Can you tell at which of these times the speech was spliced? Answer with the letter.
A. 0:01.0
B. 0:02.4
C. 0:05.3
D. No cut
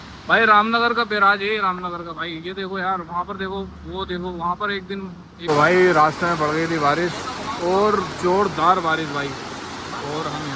C